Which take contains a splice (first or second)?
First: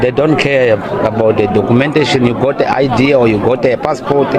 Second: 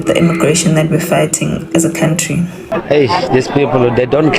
second